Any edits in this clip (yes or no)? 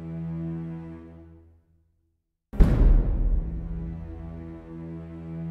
yes